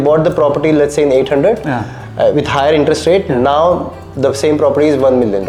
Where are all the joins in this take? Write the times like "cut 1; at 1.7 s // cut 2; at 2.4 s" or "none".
none

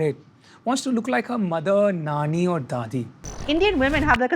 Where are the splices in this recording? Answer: cut 1; at 3.4 s

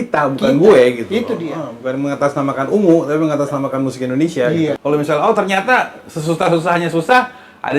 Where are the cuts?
cut 1; at 4.8 s

